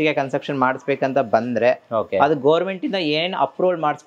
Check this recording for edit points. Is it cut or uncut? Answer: uncut